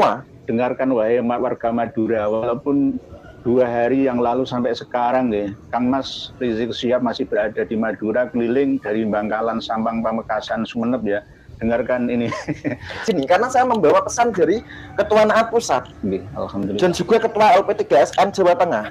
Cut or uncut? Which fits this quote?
cut